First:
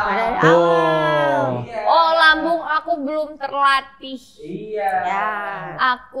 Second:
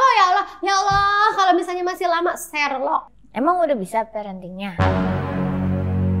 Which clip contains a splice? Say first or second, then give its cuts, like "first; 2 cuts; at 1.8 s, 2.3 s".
second; 1 cut; at 3.2 s